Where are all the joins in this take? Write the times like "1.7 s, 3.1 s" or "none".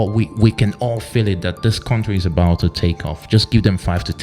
none

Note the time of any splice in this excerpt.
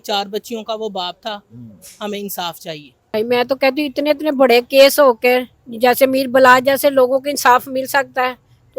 none

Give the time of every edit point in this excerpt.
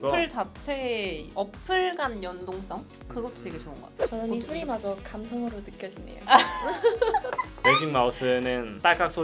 3.9 s, 7.4 s

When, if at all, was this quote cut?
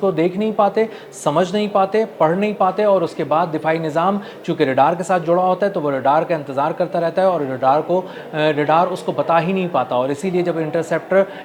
none

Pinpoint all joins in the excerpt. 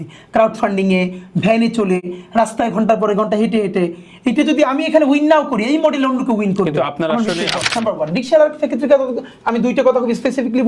7.6 s

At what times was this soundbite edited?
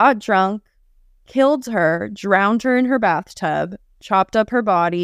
none

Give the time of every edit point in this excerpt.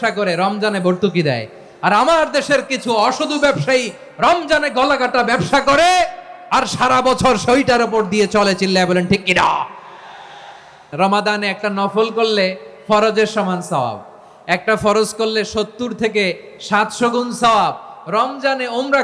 10.9 s

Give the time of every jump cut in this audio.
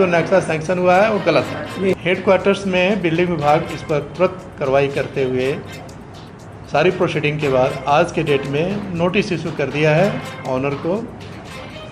2.0 s

